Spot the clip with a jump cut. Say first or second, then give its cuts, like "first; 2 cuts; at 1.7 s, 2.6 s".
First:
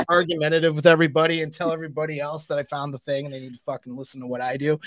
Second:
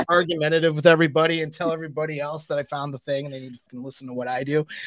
second; 1 cut; at 3.6 s